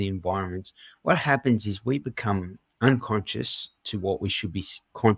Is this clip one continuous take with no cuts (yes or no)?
yes